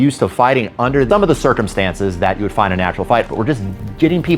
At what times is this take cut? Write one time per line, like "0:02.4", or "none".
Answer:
0:01.1
0:03.3